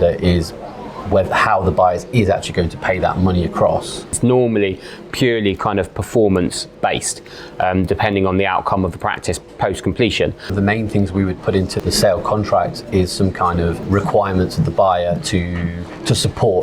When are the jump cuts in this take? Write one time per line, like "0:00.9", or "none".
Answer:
0:04.2
0:10.5
0:11.8
0:13.8